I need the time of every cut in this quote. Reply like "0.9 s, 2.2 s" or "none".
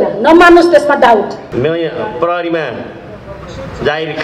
1.4 s